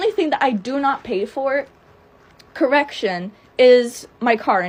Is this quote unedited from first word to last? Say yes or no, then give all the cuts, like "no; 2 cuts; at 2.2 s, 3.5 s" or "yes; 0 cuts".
yes; 0 cuts